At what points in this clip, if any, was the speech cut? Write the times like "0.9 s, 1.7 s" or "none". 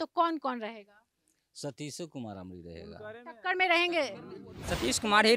4.4 s